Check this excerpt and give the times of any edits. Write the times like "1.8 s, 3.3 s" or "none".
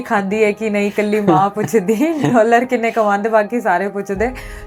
none